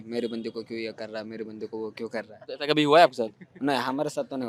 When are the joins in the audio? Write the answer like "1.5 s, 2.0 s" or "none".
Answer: none